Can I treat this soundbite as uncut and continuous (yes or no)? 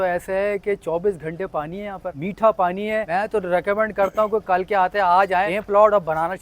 no